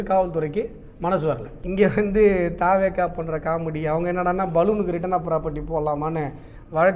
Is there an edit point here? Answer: yes; 1 cut; at 1.5 s

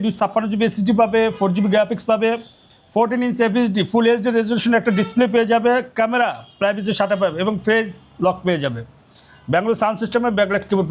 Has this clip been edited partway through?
no; 0 cuts

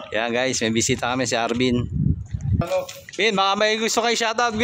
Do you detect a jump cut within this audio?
yes; 1 cut; at 2.6 s

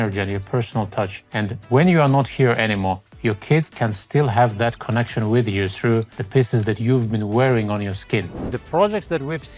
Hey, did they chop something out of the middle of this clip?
yes; 4 cuts; at 1.2 s, 3.1 s, 6.2 s, 8.4 s

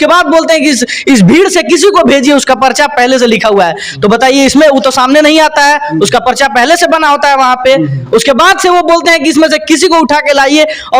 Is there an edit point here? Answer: no; 0 cuts

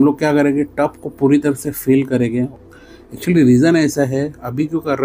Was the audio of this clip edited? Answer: yes; 1 cut; at 2.5 s

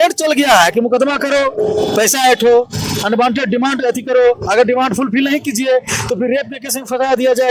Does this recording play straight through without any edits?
yes; 0 cuts

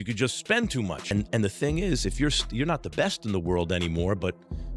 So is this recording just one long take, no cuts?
no; 1 cut; at 1.1 s

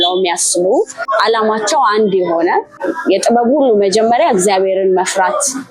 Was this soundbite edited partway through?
yes; 2 cuts; at 1.0 s, 2.9 s

